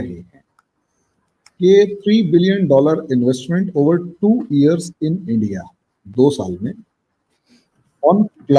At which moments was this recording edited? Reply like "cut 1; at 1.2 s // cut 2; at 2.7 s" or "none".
none

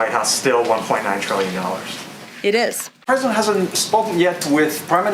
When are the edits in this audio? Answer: cut 1; at 3.0 s

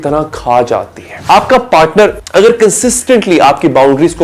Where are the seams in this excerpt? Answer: cut 1; at 1.1 s // cut 2; at 2.2 s

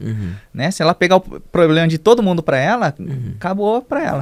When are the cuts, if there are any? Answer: none

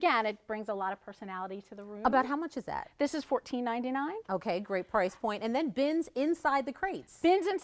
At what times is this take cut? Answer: none

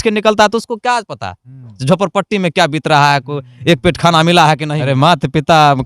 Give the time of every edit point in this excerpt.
cut 1; at 4.7 s

